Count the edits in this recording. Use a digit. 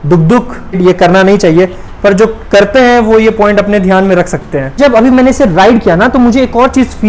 2